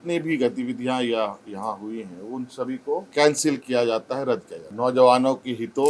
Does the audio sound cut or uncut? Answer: cut